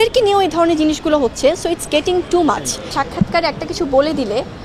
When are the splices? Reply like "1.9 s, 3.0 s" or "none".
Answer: 2.9 s